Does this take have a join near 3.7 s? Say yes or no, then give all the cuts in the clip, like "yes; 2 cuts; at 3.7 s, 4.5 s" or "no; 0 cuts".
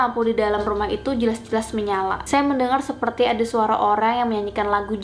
no; 1 cut; at 2.2 s